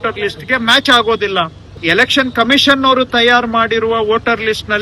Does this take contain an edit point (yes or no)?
yes